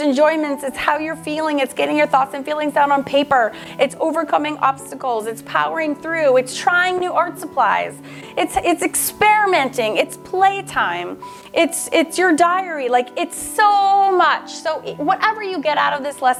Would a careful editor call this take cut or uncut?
uncut